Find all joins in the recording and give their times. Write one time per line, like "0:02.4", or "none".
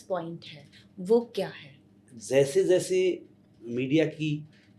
0:02.1